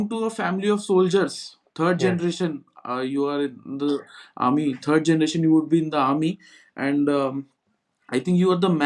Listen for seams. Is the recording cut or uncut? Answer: uncut